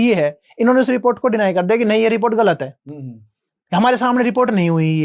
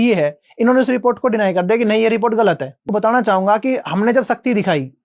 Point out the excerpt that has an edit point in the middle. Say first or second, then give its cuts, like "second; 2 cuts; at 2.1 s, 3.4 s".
second; 1 cut; at 2.9 s